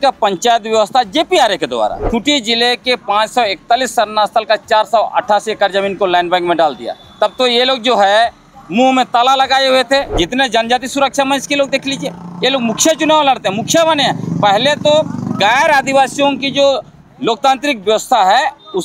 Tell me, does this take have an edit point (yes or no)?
yes